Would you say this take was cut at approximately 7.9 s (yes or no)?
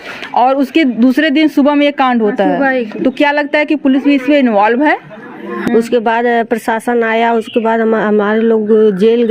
no